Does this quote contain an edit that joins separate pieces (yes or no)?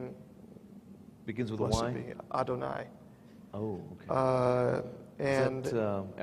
yes